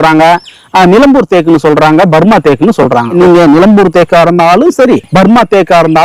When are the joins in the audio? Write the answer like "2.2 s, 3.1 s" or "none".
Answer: none